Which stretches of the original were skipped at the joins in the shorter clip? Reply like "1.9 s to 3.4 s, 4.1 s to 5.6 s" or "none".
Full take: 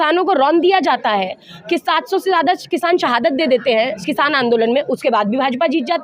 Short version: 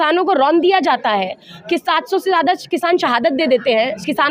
none

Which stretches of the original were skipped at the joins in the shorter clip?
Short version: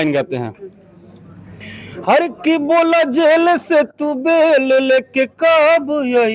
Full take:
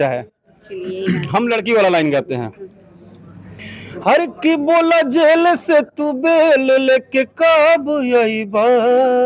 none

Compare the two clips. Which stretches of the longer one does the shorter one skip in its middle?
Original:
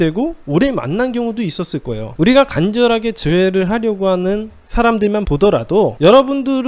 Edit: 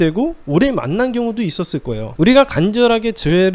none

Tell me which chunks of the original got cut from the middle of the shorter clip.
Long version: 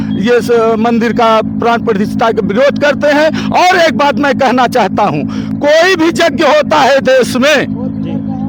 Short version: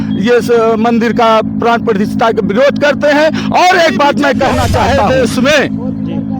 5.0 s to 7.0 s

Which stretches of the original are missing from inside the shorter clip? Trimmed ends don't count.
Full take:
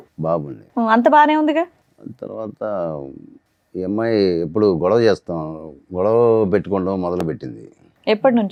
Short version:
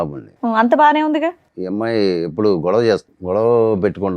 1.8 s to 3.7 s, 5.3 s to 5.8 s

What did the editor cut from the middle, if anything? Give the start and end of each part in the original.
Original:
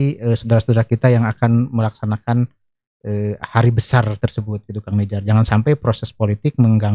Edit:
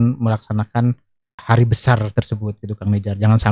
2.9 s to 3.4 s

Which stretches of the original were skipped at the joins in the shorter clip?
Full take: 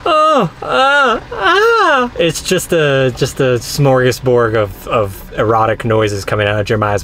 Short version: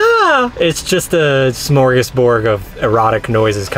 3.2 s to 3.7 s, 4.8 s to 5.2 s

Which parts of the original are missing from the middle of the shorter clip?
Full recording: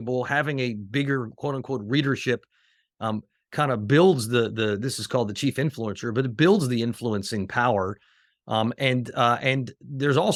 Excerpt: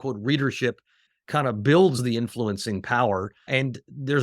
2.8 s to 3.4 s, 4.3 s to 6.7 s, 8.1 s to 9.4 s

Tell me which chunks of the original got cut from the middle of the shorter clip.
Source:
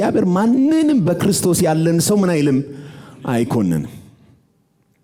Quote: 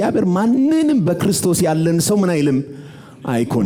none

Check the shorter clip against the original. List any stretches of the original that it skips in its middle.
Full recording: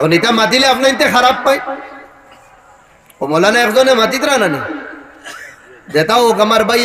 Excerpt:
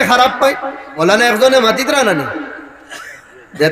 1.9 s to 3.2 s

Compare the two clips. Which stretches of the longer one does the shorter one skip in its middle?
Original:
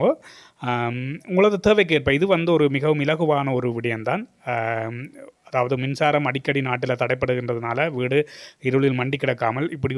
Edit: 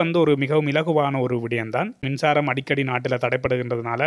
4.4 s to 5.8 s

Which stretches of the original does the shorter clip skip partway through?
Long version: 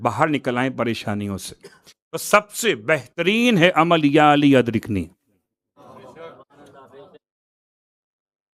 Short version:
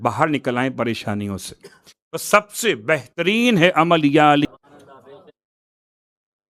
4.5 s to 6.3 s

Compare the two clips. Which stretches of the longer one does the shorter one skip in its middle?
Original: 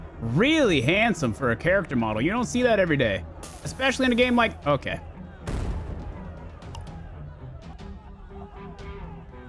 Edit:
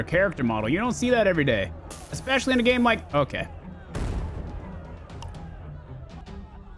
none

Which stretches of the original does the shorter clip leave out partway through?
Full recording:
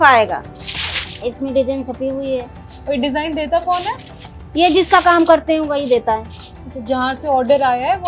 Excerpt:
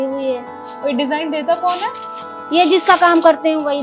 none

